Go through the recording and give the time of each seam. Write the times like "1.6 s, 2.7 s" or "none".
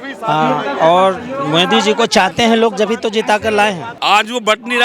3.9 s